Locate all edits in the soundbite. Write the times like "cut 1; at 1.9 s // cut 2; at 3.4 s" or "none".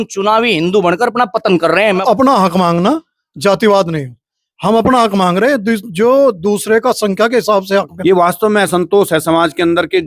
cut 1; at 2.0 s // cut 2; at 7.9 s